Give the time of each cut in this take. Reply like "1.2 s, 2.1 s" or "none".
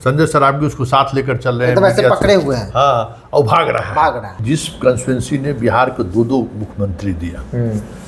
3.9 s